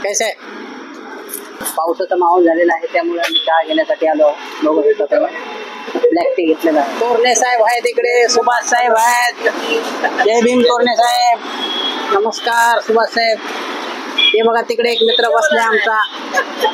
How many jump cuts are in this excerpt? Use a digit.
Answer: 2